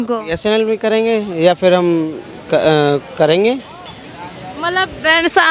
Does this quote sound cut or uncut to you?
uncut